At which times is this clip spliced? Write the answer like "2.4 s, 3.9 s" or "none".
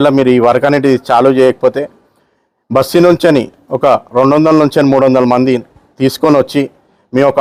none